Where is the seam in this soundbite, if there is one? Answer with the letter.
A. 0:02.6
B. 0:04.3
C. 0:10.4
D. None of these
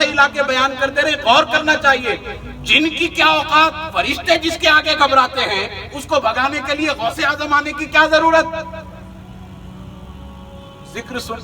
D